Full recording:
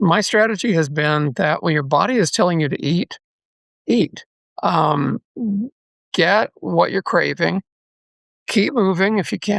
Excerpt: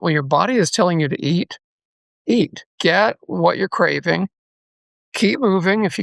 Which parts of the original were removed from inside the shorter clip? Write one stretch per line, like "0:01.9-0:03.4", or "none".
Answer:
0:04.2-0:06.0